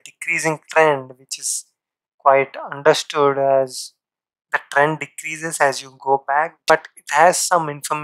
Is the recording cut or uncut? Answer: uncut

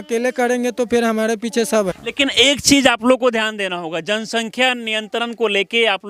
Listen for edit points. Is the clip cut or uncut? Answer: cut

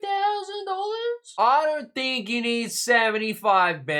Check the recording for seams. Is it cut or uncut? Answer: uncut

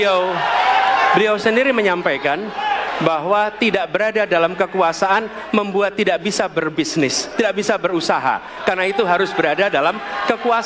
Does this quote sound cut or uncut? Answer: uncut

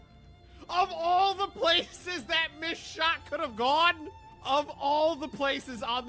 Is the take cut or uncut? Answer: uncut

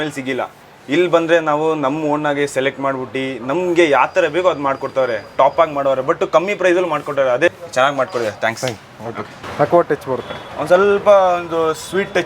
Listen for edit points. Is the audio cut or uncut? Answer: cut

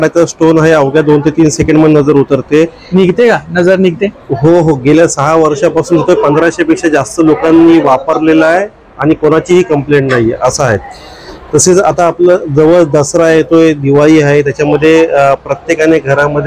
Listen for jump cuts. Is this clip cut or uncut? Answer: uncut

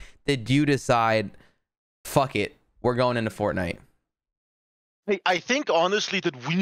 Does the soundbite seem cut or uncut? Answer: uncut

